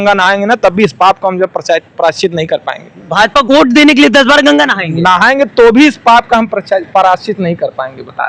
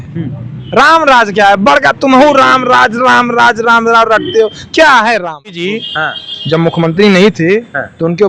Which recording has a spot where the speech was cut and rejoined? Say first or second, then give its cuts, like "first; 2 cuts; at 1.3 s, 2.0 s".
second; 1 cut; at 5.7 s